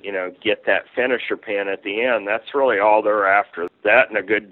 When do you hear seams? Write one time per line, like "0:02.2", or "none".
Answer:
0:03.6